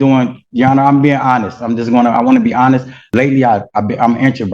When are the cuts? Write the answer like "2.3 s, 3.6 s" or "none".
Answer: 3.0 s